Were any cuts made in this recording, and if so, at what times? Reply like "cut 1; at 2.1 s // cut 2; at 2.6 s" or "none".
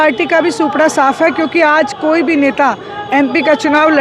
none

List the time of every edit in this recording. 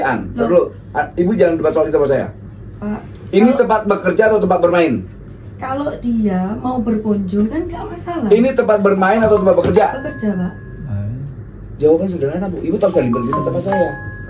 none

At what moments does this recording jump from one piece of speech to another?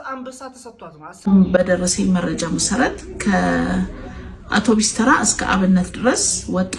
cut 1; at 1.1 s

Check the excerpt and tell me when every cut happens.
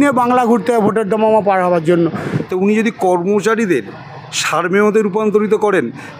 cut 1; at 2.3 s

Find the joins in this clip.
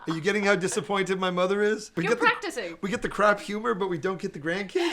cut 1; at 1.9 s

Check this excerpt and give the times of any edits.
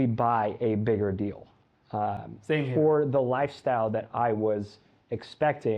none

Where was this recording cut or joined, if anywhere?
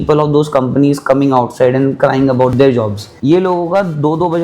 cut 1; at 2.6 s

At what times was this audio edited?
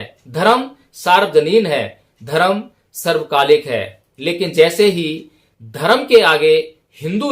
none

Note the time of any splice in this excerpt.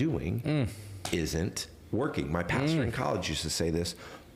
none

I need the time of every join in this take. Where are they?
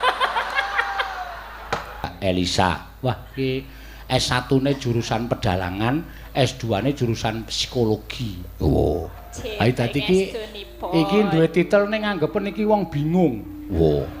cut 1; at 2.1 s

